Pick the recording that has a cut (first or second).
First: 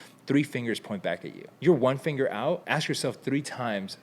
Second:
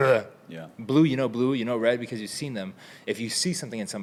first